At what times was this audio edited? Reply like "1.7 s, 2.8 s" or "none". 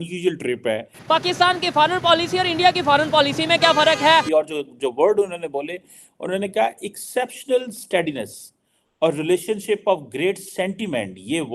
1.0 s, 4.2 s